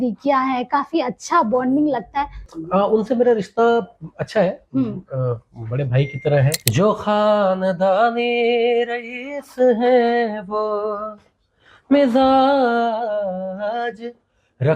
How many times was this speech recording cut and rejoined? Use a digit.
2